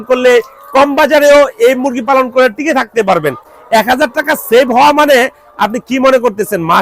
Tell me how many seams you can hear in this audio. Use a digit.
1